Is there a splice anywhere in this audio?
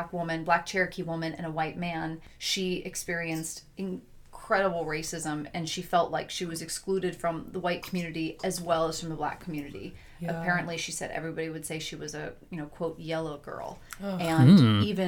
no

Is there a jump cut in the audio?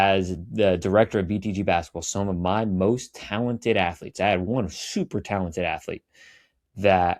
no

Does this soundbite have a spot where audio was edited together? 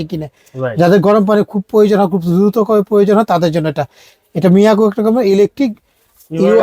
no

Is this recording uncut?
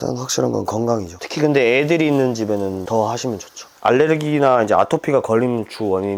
no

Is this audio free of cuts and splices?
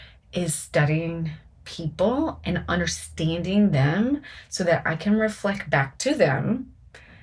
yes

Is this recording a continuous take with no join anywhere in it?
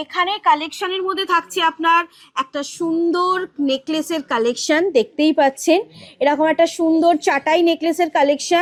yes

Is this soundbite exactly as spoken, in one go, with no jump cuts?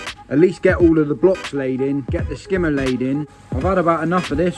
no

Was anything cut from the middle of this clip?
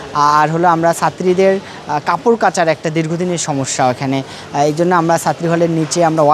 no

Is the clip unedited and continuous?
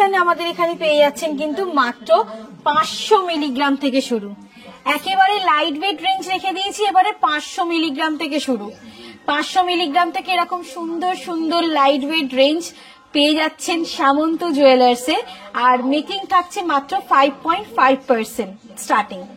yes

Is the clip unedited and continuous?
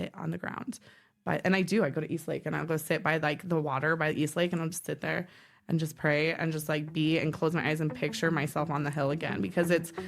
yes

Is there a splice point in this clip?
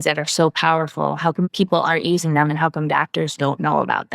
yes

